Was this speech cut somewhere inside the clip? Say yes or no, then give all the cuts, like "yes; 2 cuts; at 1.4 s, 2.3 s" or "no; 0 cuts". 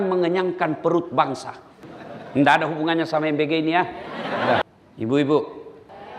yes; 1 cut; at 4.6 s